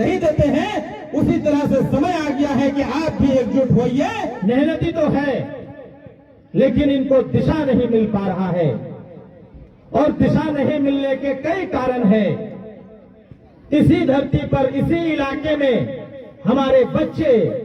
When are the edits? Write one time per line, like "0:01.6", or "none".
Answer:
0:04.3